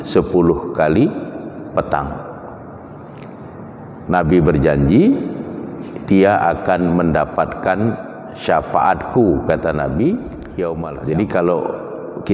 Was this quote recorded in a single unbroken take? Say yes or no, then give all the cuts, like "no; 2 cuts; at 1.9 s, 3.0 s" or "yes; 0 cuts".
no; 1 cut; at 10.9 s